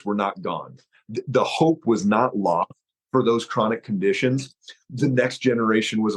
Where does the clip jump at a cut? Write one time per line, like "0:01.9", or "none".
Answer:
none